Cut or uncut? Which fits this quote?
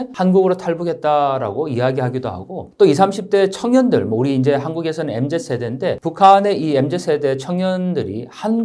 uncut